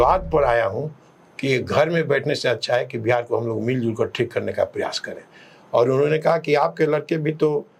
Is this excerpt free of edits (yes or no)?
yes